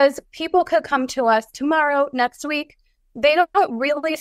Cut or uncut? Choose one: uncut